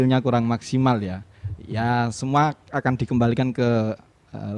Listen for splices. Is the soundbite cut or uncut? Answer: uncut